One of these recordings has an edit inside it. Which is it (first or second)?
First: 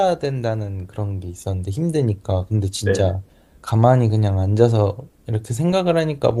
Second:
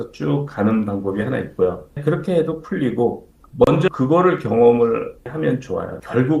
second